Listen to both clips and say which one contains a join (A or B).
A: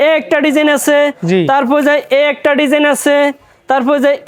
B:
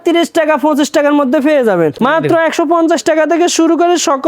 B